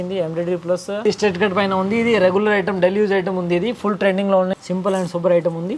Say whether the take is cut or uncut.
cut